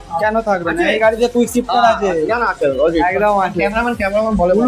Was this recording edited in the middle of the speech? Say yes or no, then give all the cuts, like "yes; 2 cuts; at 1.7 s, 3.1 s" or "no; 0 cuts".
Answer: no; 0 cuts